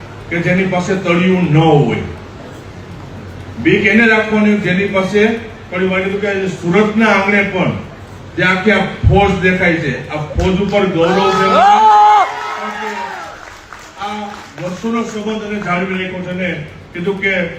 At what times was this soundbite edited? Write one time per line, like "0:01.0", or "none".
none